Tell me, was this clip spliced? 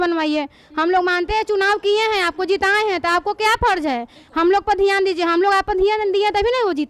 no; 0 cuts

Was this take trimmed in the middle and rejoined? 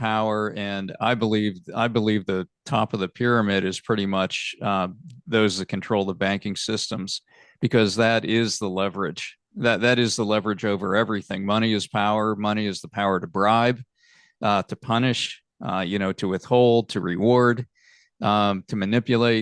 no; 0 cuts

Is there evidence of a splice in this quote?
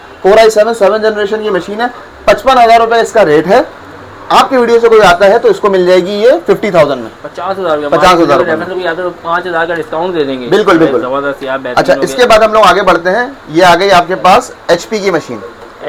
no; 0 cuts

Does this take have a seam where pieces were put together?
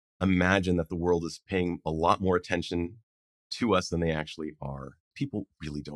yes; 1 cut; at 5.0 s

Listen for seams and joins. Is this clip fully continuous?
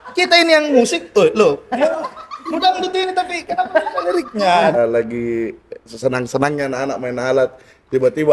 no; 1 cut; at 4.8 s

